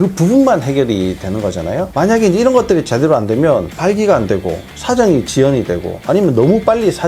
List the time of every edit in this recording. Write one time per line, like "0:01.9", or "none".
0:01.9